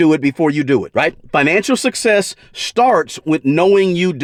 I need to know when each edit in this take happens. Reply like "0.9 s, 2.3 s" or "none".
none